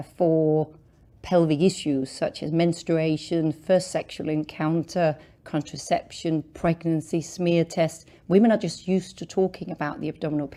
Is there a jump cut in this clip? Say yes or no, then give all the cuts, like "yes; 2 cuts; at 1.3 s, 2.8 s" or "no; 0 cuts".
no; 0 cuts